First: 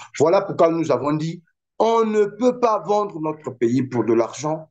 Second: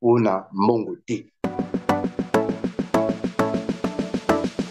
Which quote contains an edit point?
second; 1 cut; at 1.3 s

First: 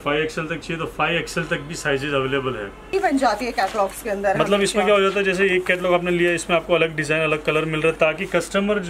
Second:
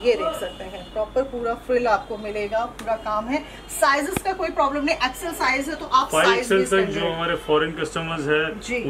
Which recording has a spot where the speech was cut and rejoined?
first; 1 cut; at 2.9 s

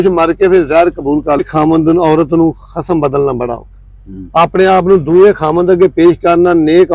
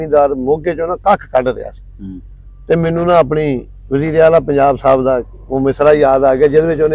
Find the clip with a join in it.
first; 1 cut; at 1.4 s

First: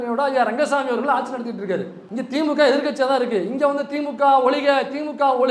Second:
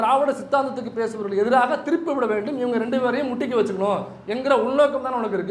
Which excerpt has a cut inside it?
first; 1 cut; at 2.0 s

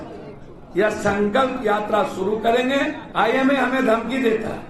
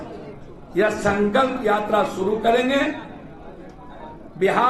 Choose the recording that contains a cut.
first; 1 cut; at 3.0 s

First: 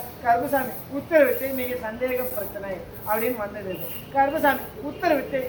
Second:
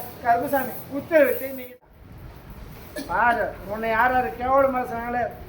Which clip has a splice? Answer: second; 1 cut; at 1.8 s

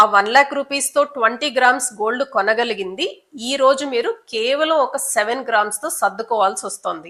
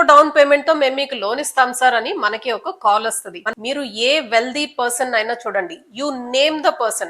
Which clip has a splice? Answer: second; 1 cut; at 3.4 s

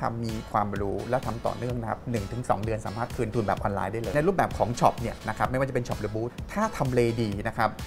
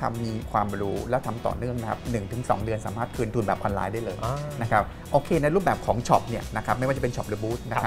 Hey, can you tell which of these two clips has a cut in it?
first; 2 cuts; at 4.1 s, 6.4 s

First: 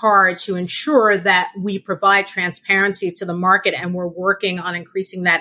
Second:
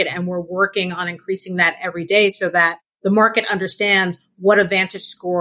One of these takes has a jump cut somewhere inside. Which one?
second; 1 cut; at 2.8 s

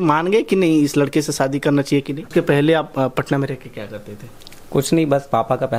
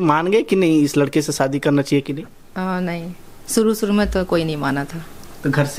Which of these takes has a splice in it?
first; 1 cut; at 2.3 s

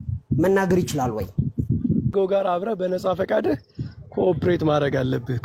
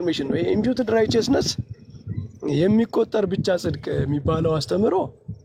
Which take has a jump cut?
first; 1 cut; at 2.1 s

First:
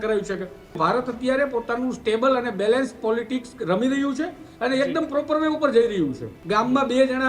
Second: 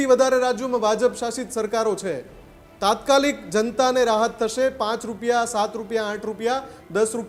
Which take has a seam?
first; 2 cuts; at 0.8 s, 6.3 s

